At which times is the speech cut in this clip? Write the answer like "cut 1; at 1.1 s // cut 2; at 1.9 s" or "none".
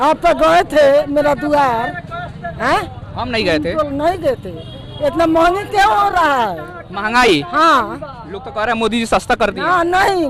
none